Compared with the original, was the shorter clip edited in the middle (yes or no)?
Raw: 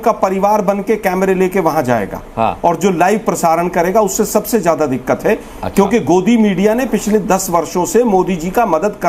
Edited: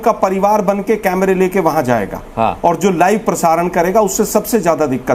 no